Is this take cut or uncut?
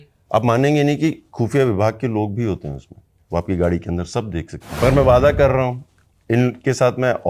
cut